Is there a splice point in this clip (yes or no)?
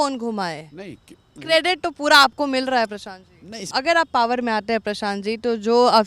yes